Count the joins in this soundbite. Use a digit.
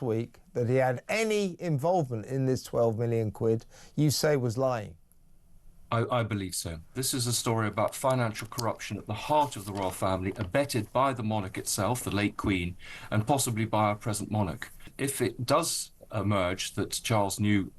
2